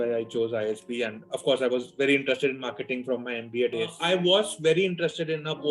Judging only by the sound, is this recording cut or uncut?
cut